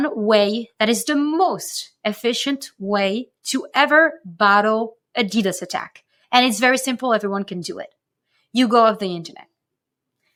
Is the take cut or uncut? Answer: uncut